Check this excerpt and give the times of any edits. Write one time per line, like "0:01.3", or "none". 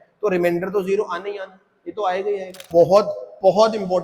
0:02.6